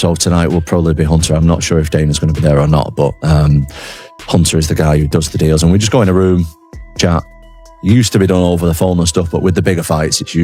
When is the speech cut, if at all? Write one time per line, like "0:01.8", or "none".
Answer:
none